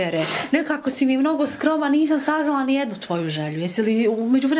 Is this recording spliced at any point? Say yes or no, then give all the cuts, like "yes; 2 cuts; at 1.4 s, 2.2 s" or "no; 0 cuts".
no; 0 cuts